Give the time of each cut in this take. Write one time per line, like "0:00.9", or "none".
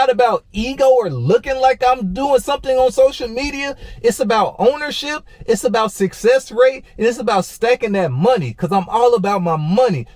none